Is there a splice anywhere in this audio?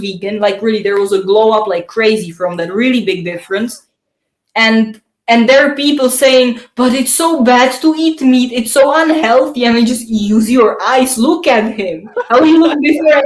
no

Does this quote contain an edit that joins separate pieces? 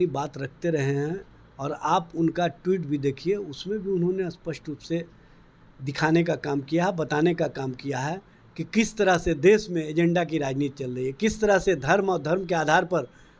no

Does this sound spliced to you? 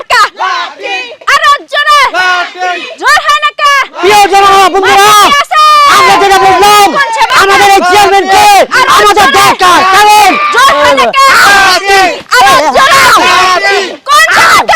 no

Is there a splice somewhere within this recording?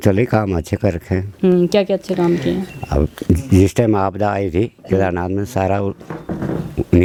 no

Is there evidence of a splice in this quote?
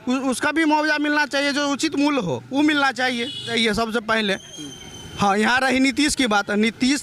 yes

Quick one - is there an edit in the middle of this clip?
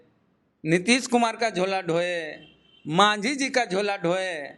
no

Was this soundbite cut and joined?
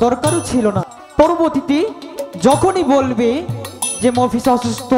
yes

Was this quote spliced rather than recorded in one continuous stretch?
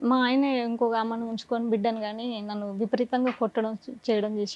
no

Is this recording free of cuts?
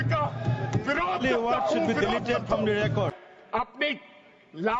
no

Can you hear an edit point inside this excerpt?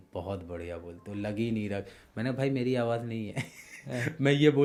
no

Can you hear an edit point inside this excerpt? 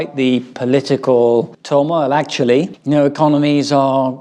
no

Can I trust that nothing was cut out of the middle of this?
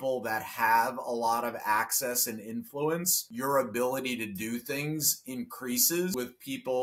no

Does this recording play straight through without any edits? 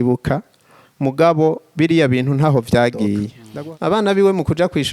no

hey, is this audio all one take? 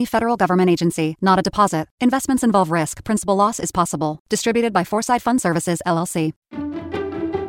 no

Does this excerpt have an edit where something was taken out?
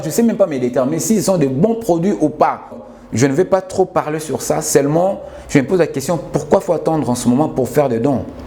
yes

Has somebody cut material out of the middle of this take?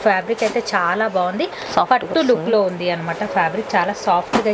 no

